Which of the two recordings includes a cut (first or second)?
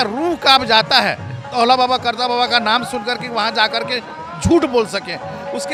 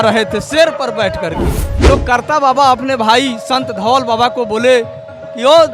second